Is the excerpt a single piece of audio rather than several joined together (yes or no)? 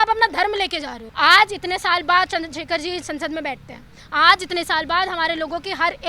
no